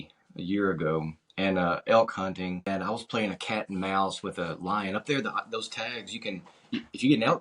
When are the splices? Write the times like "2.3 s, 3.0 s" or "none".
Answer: 2.7 s